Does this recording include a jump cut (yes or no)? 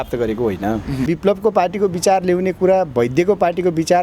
yes